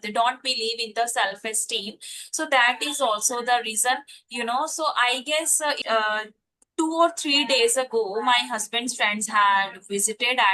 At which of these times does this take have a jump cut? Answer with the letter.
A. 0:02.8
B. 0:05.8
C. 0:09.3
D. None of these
B